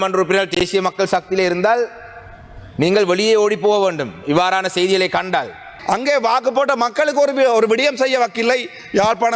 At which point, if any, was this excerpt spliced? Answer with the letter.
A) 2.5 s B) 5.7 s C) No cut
B